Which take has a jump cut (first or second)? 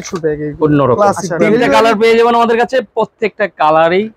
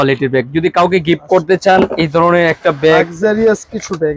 first